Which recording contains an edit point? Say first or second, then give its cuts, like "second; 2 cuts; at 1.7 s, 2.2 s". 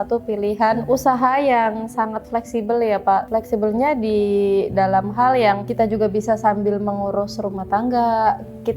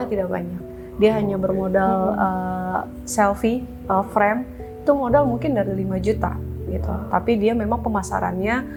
first; 3 cuts; at 0.8 s, 3.3 s, 5.7 s